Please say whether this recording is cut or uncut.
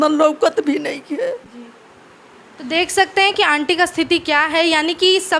uncut